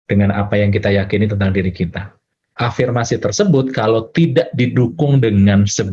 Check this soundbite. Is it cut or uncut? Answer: cut